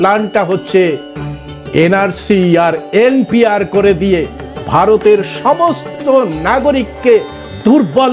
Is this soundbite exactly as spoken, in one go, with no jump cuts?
yes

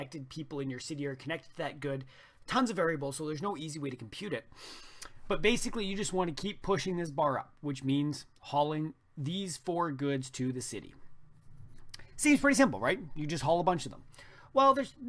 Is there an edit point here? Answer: yes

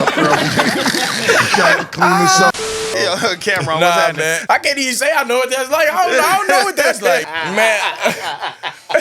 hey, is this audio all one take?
no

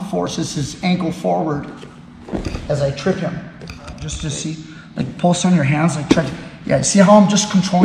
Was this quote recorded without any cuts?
no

